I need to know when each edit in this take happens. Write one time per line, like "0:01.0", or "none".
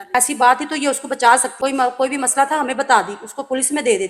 none